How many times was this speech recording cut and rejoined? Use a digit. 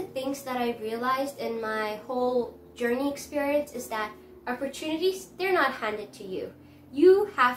0